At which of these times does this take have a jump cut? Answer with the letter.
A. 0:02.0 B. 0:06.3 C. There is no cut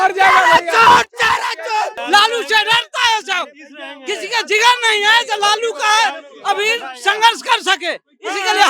A